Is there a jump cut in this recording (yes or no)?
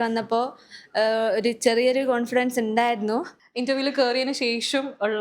yes